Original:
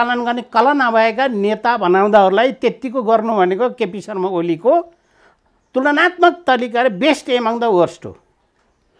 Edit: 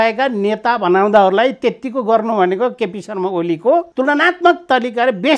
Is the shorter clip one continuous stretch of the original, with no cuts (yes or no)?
no